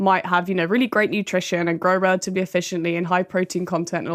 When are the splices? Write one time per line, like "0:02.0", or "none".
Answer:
none